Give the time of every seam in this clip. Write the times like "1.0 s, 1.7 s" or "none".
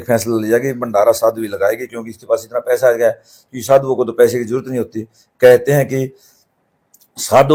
none